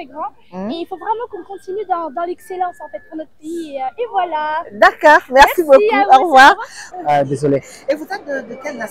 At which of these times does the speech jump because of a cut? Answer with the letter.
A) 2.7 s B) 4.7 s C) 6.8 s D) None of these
C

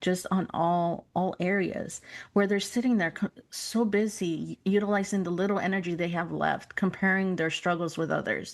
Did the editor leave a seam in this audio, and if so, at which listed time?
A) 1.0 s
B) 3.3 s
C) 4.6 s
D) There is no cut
A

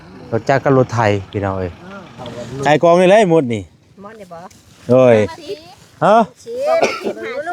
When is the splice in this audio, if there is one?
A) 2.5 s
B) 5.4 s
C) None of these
A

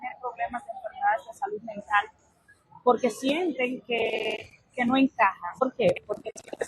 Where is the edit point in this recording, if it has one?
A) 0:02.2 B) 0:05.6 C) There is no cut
B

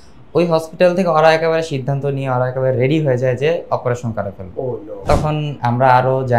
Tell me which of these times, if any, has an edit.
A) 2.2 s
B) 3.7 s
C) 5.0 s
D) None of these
C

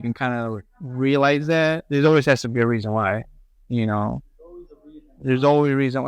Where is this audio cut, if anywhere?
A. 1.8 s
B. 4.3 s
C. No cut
A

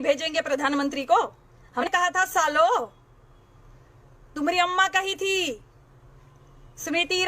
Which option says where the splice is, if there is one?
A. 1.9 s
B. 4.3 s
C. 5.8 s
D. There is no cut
A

